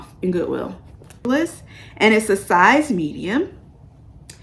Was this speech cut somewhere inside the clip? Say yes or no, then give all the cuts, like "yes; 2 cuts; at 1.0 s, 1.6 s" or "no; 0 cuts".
yes; 1 cut; at 1.2 s